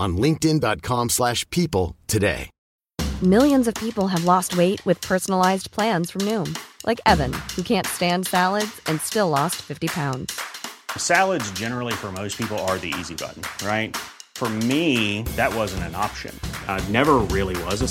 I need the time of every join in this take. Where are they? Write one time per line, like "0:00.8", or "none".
none